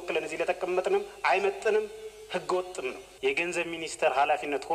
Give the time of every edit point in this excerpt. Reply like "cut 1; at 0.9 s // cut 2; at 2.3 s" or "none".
cut 1; at 3.1 s